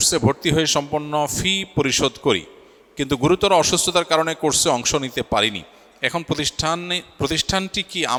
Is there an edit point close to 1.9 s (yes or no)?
no